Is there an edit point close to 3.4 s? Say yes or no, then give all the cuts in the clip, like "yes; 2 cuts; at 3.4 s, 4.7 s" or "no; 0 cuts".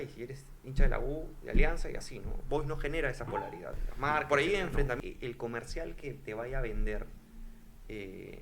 no; 1 cut; at 5.0 s